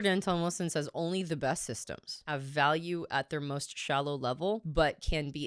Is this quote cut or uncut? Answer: cut